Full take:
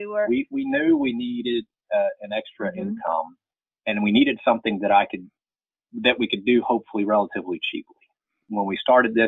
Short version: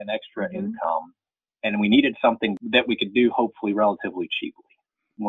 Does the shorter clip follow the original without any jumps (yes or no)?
no